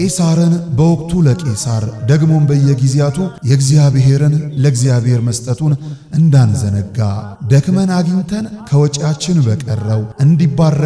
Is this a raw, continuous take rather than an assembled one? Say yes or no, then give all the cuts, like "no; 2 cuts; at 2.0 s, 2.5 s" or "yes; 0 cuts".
yes; 0 cuts